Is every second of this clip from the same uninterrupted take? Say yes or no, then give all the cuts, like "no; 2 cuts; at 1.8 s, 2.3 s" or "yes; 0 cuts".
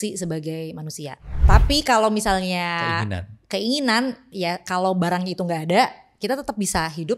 no; 1 cut; at 1.3 s